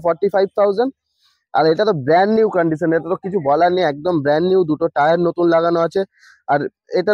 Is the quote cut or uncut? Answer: uncut